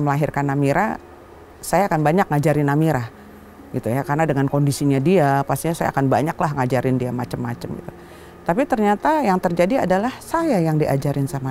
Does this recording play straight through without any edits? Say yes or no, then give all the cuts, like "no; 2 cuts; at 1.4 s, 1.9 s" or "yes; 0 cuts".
yes; 0 cuts